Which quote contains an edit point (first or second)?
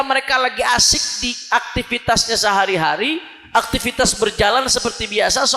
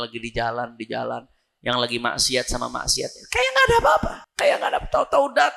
second